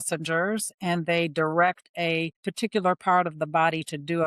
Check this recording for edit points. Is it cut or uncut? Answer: cut